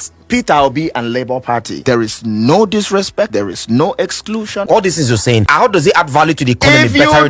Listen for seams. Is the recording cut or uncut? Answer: cut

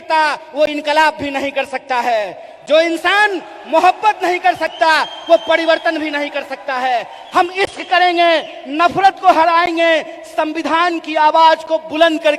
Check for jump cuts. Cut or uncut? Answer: uncut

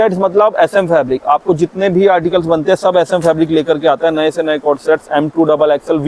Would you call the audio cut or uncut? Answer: uncut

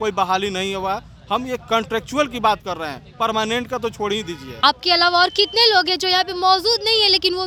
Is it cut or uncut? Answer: uncut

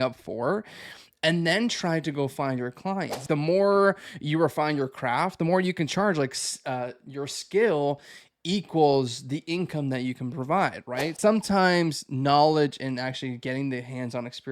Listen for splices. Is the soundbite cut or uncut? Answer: cut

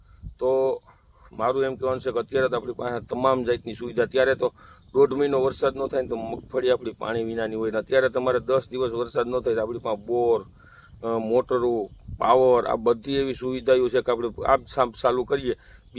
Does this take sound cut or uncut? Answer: uncut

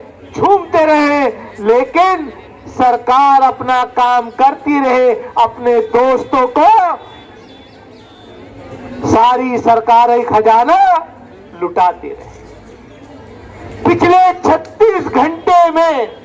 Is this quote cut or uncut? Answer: uncut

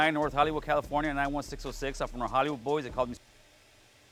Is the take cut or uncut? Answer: uncut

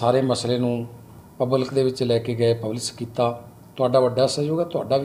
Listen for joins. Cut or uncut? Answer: uncut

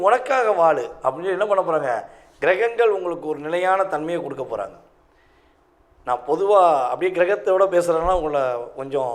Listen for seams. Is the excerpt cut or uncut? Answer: uncut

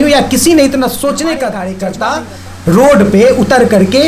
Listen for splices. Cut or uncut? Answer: cut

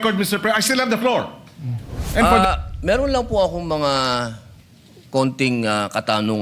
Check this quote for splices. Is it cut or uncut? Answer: cut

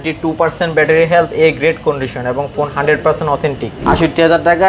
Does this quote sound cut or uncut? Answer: cut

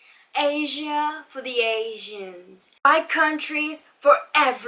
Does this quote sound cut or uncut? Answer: uncut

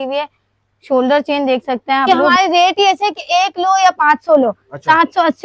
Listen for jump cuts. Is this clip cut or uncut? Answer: cut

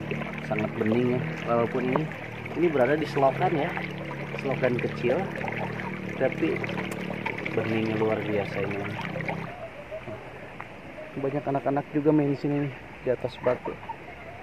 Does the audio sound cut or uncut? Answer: cut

